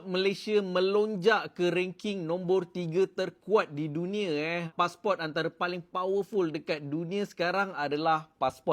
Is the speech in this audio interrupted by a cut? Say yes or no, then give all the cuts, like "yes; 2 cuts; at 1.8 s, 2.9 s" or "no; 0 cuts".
no; 0 cuts